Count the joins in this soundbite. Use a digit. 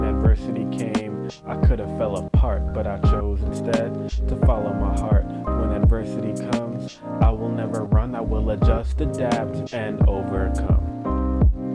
0